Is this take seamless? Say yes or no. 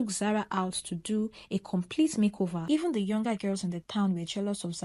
no